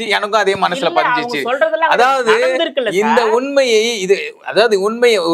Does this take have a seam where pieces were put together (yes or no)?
no